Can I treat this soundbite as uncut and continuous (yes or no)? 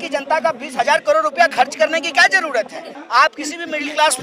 no